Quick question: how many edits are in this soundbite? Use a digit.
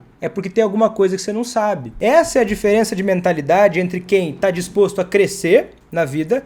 1